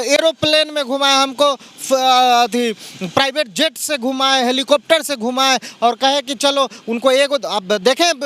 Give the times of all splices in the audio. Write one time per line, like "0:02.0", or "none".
none